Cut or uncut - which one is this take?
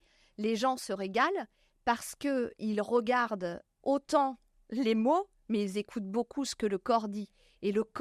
uncut